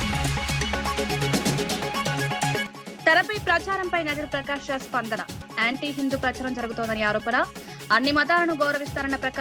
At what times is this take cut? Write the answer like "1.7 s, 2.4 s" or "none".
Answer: 0.8 s, 2.2 s